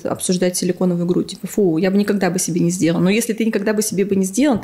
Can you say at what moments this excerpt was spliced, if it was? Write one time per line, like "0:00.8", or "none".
none